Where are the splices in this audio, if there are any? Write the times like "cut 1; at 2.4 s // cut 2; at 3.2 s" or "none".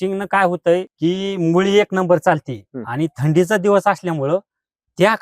cut 1; at 0.9 s